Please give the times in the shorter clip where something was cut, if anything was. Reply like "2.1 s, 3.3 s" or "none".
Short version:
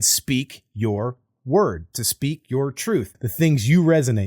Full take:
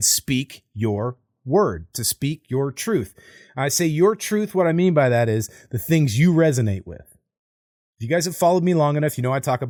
3.2 s